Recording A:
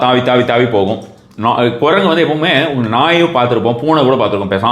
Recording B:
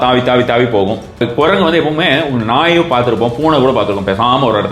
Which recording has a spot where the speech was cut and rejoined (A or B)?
B